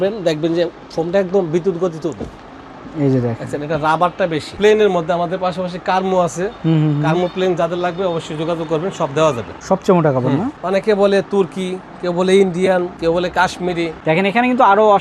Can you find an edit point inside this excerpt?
yes; 5 cuts; at 4.5 s, 9.5 s, 10.5 s, 13.0 s, 14.0 s

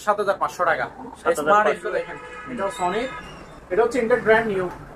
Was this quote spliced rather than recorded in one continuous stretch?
no; 0 cuts

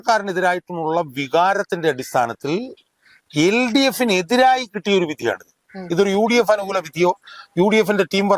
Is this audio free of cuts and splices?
yes; 0 cuts

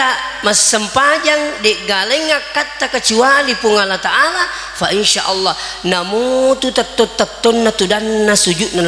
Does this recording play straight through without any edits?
yes; 0 cuts

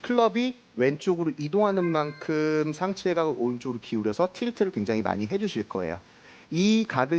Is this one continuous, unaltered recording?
yes; 0 cuts

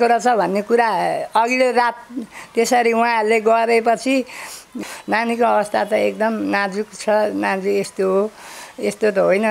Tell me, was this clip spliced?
yes; 1 cut; at 4.8 s

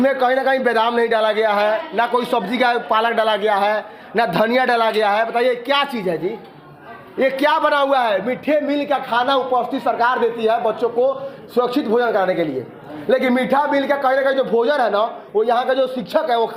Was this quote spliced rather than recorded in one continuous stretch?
no; 0 cuts

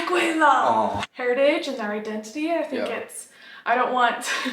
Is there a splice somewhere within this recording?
yes; 1 cut; at 1.1 s

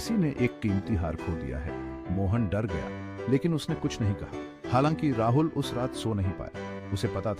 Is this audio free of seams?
no; 1 cut; at 3.3 s

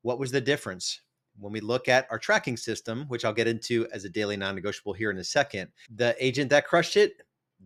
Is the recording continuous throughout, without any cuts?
yes; 0 cuts

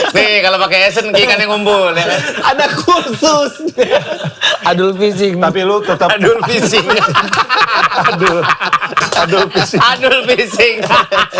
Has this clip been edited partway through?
no; 0 cuts

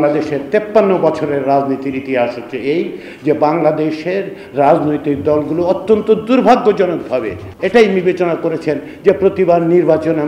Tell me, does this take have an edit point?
yes; 1 cut; at 7.4 s

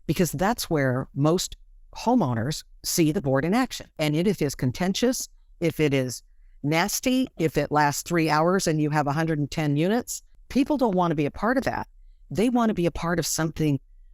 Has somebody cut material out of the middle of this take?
yes; 1 cut; at 3.9 s

